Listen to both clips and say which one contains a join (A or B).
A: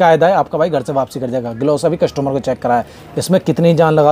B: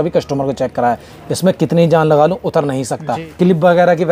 B